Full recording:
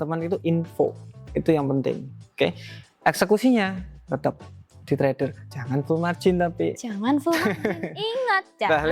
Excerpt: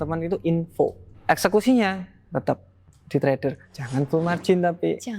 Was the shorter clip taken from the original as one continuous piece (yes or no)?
no